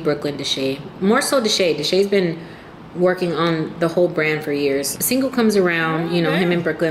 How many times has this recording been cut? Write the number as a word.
one